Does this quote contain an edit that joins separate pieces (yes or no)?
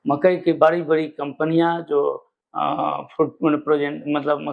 no